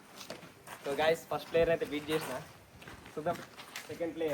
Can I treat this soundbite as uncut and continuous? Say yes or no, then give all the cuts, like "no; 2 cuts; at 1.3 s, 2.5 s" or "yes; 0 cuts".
yes; 0 cuts